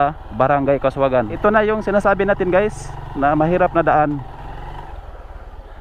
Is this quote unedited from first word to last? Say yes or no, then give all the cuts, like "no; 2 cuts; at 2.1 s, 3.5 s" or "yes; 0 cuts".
no; 2 cuts; at 1.4 s, 4.4 s